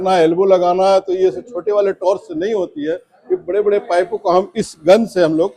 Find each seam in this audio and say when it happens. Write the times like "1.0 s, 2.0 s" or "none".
none